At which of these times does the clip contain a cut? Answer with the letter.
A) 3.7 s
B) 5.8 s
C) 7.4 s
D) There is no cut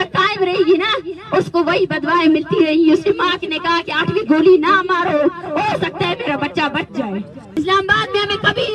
C